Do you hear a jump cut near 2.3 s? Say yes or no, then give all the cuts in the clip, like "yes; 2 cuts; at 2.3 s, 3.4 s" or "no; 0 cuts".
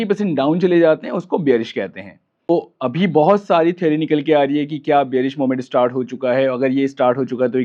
no; 0 cuts